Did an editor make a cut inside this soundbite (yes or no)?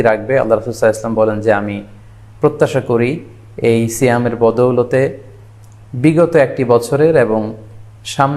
no